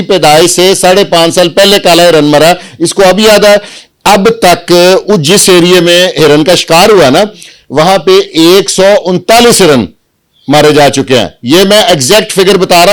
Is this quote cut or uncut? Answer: uncut